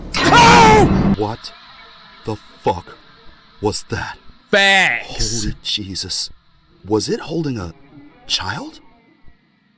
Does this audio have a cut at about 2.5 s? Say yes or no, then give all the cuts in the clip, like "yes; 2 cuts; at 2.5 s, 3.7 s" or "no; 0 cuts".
no; 1 cut; at 1.1 s